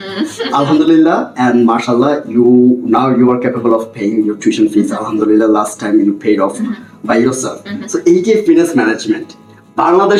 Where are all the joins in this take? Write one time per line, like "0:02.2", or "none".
none